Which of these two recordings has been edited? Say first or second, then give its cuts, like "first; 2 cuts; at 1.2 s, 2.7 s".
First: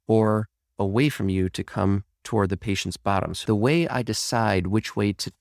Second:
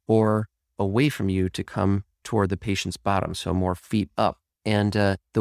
first; 1 cut; at 3.4 s